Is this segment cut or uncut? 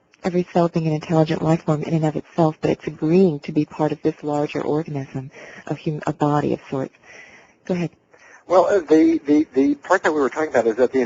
uncut